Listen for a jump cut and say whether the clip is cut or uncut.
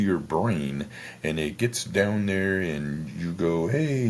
uncut